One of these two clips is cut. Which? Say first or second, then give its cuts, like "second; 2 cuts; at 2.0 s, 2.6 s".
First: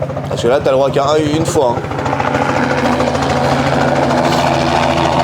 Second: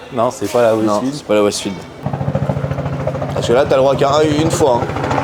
second; 1 cut; at 2.0 s